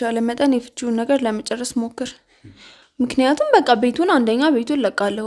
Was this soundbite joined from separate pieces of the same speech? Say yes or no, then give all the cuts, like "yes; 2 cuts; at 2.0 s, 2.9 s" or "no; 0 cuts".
no; 0 cuts